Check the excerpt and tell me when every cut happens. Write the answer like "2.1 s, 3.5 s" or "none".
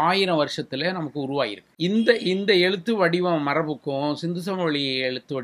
1.6 s